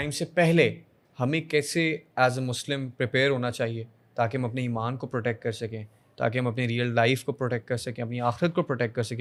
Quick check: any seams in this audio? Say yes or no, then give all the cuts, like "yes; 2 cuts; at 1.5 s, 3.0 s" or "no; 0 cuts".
no; 0 cuts